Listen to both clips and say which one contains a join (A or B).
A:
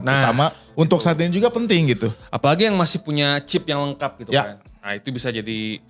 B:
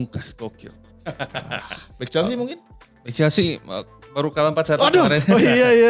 B